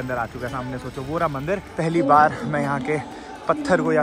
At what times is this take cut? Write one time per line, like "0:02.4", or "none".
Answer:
0:01.7